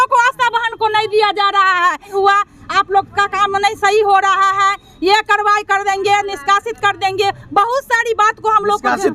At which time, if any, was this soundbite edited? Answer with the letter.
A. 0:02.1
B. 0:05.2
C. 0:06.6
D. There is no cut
A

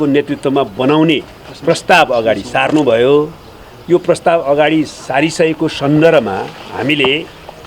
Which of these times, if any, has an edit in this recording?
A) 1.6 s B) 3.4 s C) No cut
C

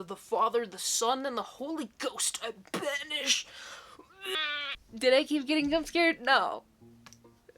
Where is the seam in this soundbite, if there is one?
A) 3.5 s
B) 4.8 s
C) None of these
B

